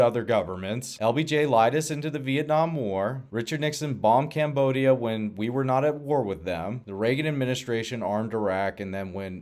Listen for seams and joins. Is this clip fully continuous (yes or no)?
no